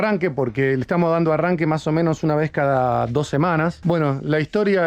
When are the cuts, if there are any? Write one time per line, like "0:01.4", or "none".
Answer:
0:03.8